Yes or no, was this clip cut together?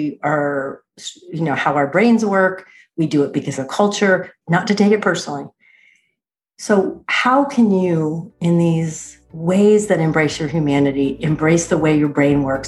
yes